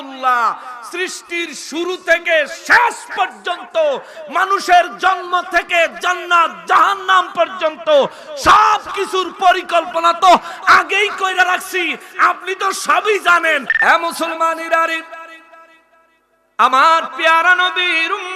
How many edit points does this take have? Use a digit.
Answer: 1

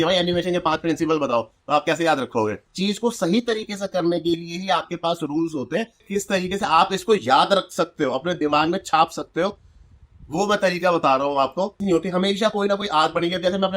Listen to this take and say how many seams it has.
3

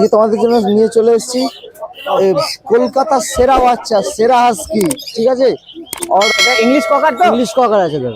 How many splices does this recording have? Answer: 1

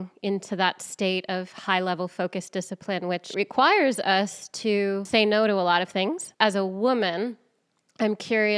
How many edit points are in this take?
3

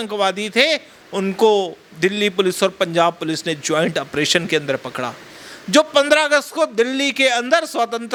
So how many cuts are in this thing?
0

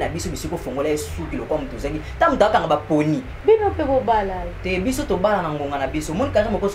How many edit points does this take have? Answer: 1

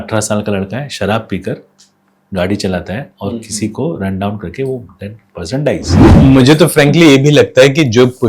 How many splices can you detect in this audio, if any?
1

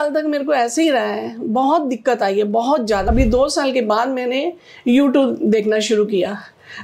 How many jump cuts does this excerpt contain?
1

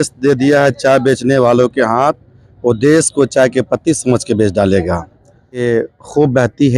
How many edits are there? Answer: 1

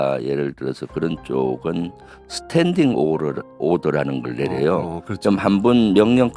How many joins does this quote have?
0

